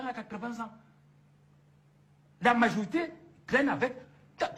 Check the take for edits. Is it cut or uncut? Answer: uncut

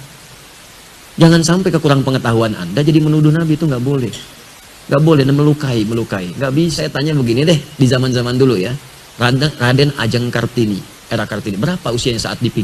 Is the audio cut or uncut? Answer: cut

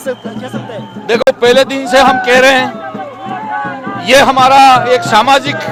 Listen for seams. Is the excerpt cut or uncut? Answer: uncut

